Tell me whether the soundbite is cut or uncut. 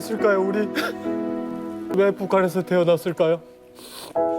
cut